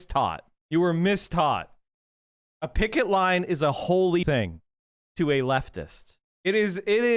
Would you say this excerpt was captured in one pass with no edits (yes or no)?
no